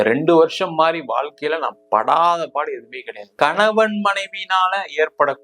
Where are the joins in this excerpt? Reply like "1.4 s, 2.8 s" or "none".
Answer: 3.2 s